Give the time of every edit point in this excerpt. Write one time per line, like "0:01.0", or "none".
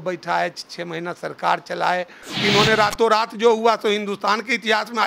0:02.2